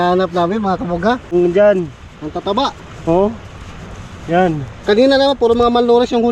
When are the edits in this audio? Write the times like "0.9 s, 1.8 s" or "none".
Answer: 1.3 s

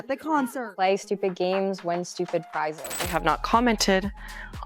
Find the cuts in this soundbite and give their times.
2.9 s

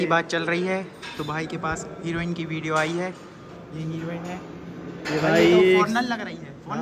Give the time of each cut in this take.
none

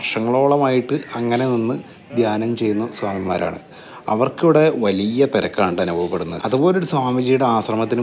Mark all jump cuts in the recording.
none

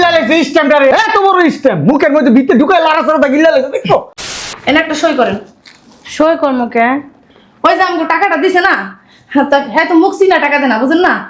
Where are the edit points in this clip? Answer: 4.2 s

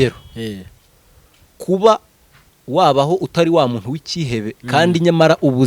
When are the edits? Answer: none

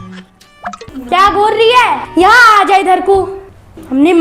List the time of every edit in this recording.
0.9 s

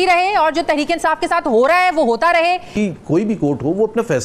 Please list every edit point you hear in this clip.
2.8 s

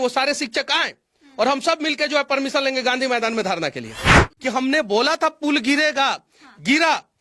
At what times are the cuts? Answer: 4.3 s

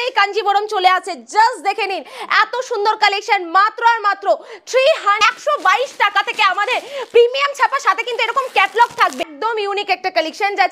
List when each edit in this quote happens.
5.2 s, 9.2 s

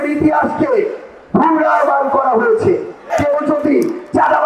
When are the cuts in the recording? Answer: 3.1 s

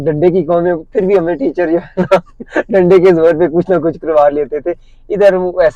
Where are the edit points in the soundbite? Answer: none

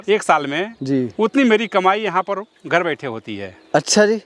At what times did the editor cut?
none

